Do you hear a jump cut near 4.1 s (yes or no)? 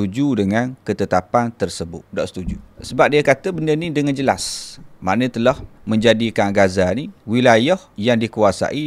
no